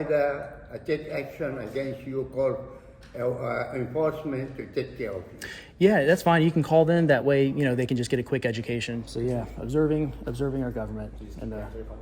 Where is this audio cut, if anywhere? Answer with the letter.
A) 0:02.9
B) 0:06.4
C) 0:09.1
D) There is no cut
C